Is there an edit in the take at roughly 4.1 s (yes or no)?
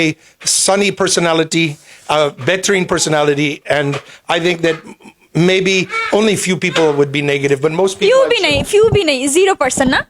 no